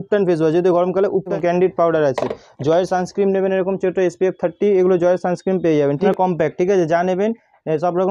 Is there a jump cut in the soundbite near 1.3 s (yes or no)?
yes